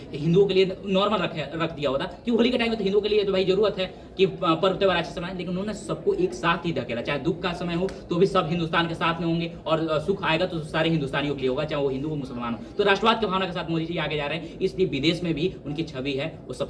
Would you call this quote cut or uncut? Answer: uncut